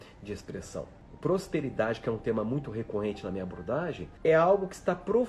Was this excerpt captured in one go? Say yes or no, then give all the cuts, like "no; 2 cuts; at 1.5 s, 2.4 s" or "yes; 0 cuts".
no; 2 cuts; at 1.0 s, 4.1 s